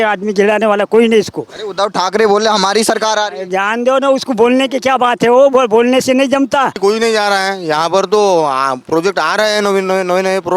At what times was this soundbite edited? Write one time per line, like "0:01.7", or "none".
0:06.8